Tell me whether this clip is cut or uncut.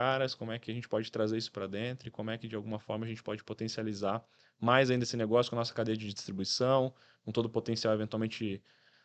uncut